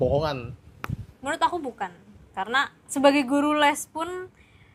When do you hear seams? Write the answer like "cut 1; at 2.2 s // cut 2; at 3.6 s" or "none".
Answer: none